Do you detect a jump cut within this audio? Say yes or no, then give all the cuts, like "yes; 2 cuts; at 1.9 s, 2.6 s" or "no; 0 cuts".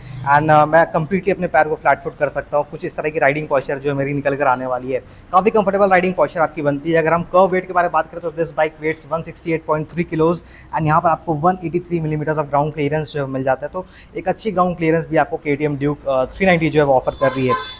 no; 0 cuts